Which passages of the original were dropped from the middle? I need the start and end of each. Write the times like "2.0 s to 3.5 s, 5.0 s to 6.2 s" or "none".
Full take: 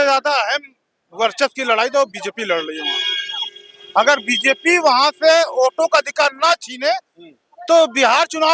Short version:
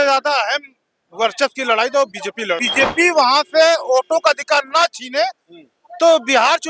2.7 s to 4.3 s